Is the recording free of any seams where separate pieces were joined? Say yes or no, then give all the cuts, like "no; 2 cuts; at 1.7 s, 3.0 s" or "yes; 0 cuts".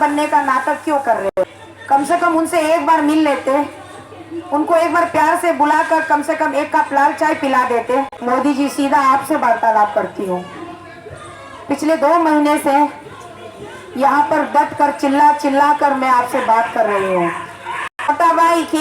no; 3 cuts; at 1.3 s, 8.2 s, 18.1 s